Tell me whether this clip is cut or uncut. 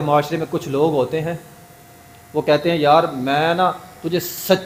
uncut